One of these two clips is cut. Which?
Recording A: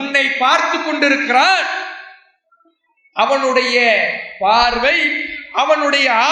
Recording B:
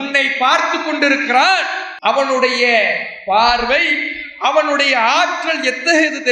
B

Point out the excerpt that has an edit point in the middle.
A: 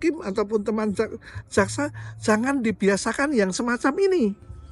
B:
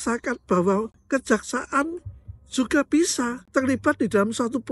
B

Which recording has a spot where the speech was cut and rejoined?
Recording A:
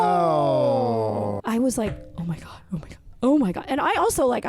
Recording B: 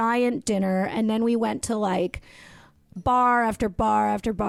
A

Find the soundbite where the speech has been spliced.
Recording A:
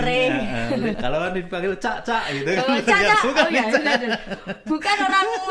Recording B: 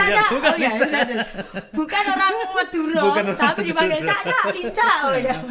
A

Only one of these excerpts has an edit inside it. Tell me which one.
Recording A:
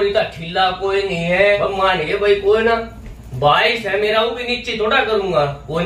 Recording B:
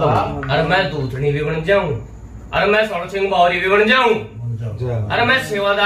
A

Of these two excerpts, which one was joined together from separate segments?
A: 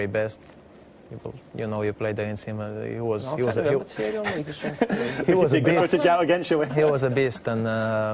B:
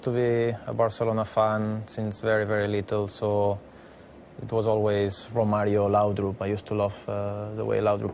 B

